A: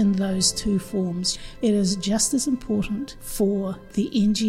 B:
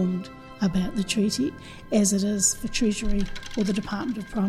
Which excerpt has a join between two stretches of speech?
A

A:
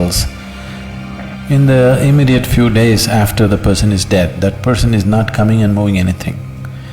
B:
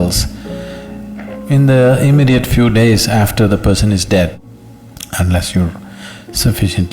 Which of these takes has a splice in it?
B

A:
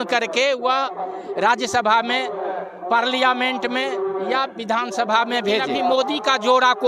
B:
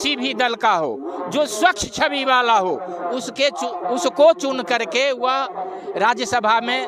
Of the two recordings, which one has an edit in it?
A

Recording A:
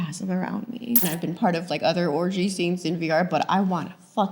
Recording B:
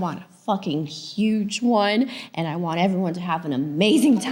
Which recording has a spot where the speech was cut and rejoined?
A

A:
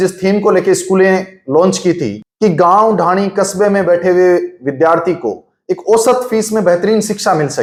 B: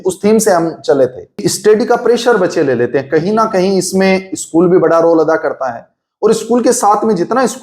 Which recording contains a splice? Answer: B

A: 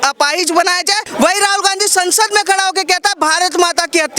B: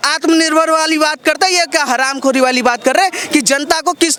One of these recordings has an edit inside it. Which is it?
A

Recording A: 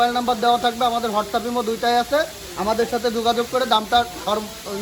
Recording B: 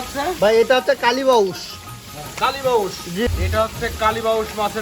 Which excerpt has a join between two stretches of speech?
B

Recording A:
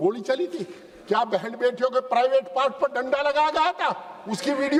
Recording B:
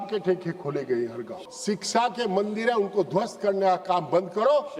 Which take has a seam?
B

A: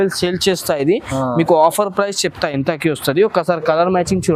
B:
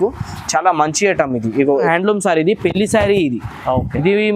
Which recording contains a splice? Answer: B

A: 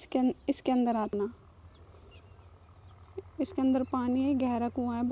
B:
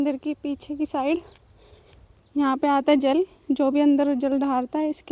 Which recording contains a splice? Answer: A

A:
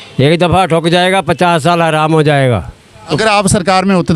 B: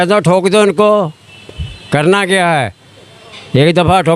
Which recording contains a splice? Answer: A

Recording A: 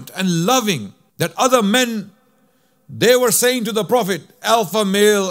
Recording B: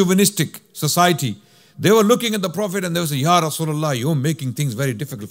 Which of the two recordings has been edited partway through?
A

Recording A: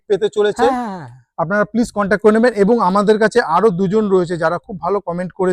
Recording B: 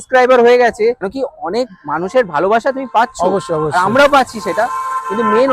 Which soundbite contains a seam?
B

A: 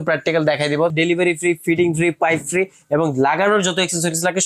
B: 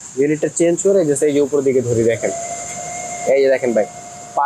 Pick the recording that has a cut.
A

